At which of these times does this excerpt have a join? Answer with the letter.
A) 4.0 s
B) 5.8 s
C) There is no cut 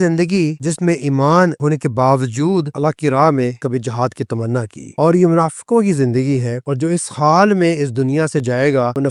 C